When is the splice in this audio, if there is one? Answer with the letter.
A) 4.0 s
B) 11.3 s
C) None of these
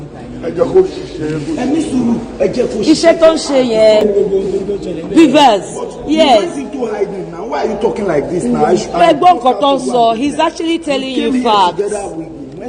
A